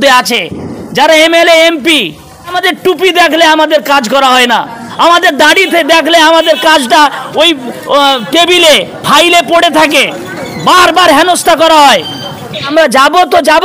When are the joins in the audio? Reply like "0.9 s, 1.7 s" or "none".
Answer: 2.6 s, 12.7 s

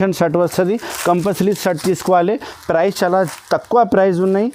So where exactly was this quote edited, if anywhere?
none

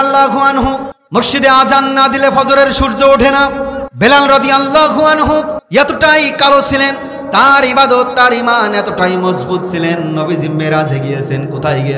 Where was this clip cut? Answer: 0.9 s, 3.8 s, 5.6 s

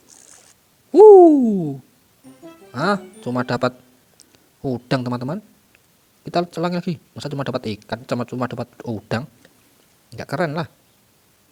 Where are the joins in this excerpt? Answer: none

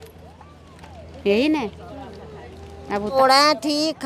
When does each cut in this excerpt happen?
3.1 s

